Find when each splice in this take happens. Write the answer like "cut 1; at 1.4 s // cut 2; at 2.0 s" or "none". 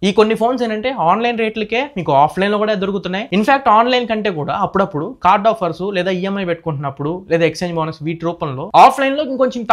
none